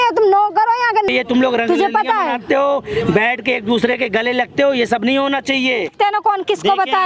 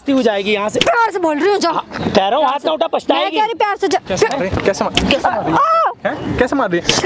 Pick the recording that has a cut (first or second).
first